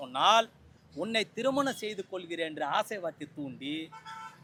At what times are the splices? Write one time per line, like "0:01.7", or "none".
none